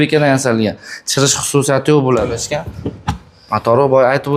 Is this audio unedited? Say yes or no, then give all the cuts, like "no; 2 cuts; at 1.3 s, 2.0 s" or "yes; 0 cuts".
no; 1 cut; at 2.4 s